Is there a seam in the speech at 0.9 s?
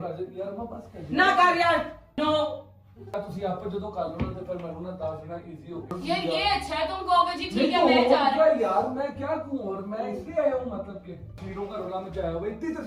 no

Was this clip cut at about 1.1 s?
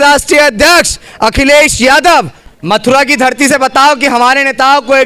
no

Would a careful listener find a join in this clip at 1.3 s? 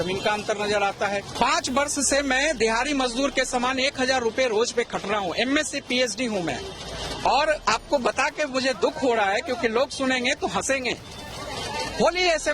yes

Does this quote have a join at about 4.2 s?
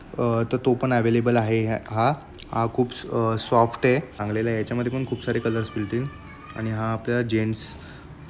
yes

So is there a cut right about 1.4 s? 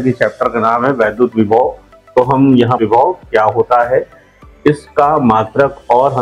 no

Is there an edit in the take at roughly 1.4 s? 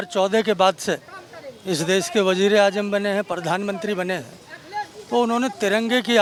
no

